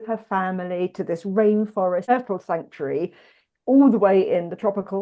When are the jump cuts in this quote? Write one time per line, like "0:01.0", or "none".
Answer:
0:02.0